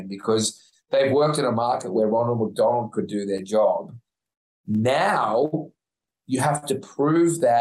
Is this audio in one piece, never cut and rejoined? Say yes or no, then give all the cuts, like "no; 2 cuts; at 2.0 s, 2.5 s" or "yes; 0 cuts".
yes; 0 cuts